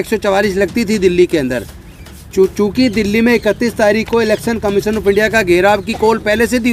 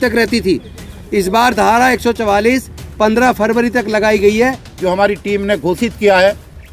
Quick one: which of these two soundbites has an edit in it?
second; 1 cut; at 4.7 s

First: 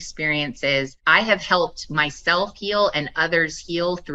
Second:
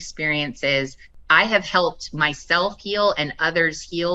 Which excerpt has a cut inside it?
first; 1 cut; at 1.0 s

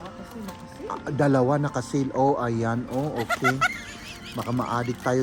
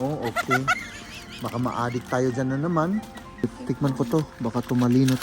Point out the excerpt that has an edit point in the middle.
second; 1 cut; at 3.2 s

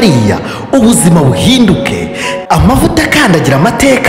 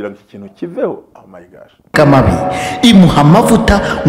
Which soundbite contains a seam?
second; 1 cut; at 1.9 s

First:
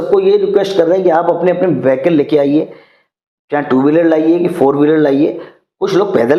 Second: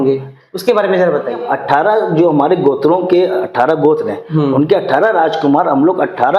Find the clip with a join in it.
second; 1 cut; at 1.5 s

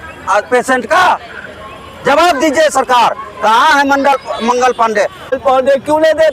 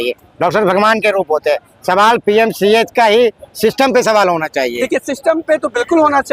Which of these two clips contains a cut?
first; 1 cut; at 5.3 s

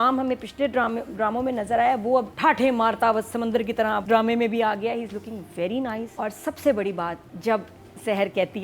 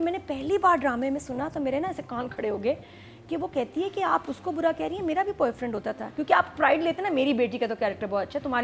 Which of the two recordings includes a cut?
first; 4 cuts; at 2.3 s, 4.0 s, 6.1 s, 7.3 s

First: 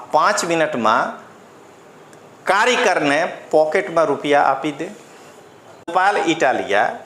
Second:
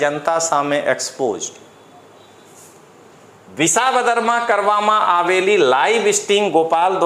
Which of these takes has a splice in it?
first; 1 cut; at 5.9 s

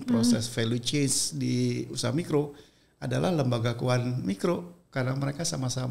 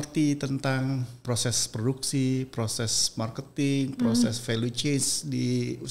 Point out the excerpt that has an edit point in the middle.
second; 1 cut; at 1.2 s

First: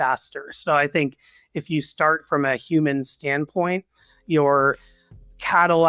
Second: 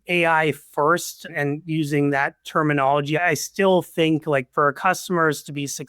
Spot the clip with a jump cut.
second; 3 cuts; at 1.3 s, 3.2 s, 4.5 s

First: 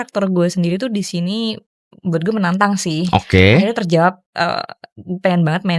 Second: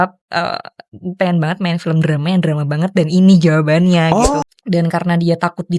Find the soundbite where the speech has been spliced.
second; 1 cut; at 4.4 s

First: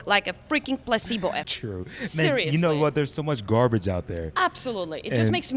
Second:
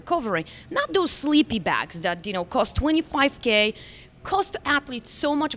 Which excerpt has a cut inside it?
first; 1 cut; at 1.6 s

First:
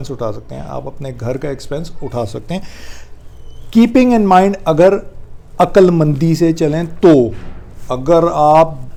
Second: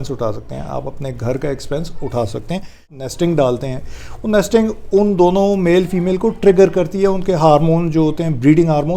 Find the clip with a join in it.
second; 1 cut; at 3.0 s

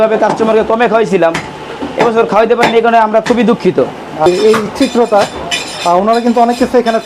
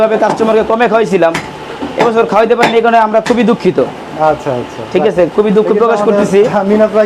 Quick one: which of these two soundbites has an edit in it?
first; 1 cut; at 4.3 s

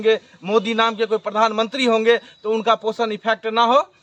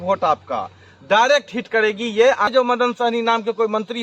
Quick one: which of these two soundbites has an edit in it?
second; 1 cut; at 2.5 s

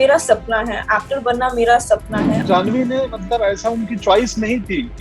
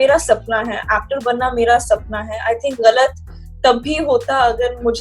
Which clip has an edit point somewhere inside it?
first; 1 cut; at 2.4 s

